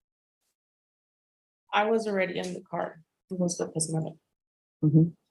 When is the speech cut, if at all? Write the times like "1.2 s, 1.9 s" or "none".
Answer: 3.5 s